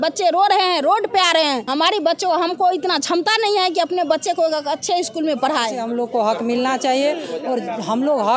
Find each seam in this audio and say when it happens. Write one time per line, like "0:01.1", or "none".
0:01.6
0:05.8